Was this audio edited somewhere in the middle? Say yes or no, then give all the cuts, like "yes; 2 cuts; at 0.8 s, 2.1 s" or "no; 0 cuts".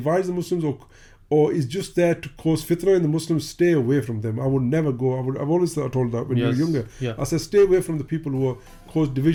no; 0 cuts